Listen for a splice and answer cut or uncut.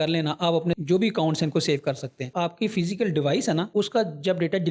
cut